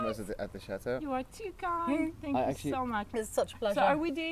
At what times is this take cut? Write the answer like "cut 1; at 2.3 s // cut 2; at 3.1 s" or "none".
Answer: none